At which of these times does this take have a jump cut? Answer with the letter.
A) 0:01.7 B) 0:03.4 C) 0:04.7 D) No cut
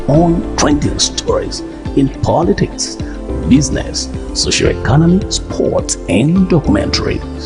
D